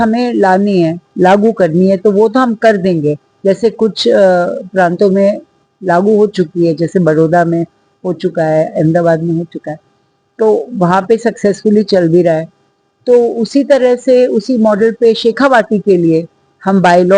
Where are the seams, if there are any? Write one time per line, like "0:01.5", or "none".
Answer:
none